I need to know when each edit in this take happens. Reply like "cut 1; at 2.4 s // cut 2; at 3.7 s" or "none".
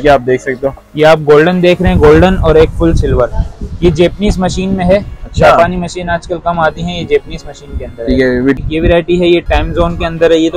cut 1; at 8.6 s

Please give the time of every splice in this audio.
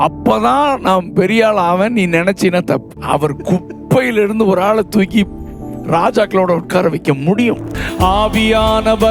cut 1; at 2.9 s // cut 2; at 7.8 s

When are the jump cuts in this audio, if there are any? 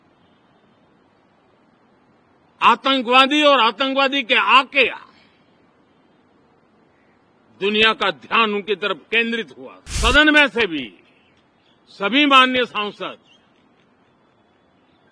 cut 1; at 9.9 s

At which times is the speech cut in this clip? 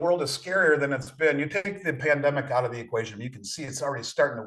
none

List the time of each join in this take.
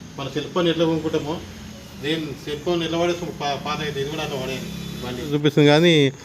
cut 1; at 5.3 s

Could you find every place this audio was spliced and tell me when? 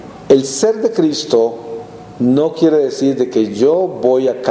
cut 1; at 3.2 s

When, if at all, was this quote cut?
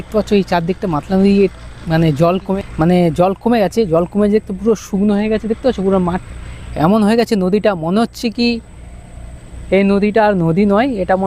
cut 1; at 2.6 s

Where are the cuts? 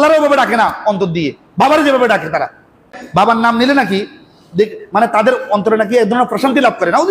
cut 1; at 3.0 s

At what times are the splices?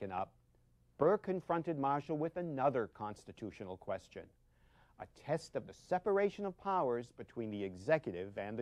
none

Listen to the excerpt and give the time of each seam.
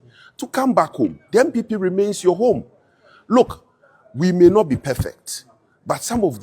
none

